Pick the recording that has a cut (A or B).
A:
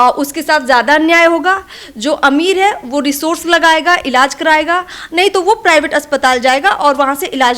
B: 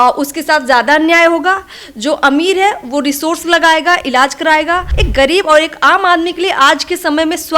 B